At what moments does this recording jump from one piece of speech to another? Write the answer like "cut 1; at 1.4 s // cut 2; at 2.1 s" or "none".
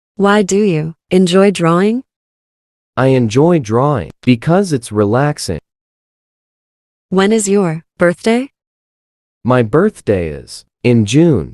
cut 1; at 0.9 s